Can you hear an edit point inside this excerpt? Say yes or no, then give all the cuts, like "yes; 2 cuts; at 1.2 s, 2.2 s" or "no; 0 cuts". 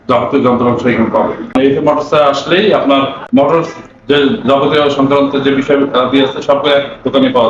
yes; 2 cuts; at 1.5 s, 3.2 s